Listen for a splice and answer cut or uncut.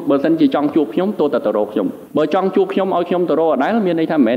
cut